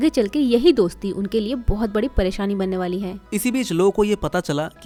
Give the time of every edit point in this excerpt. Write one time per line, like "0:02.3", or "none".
none